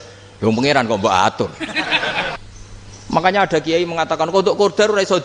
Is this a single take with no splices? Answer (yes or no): no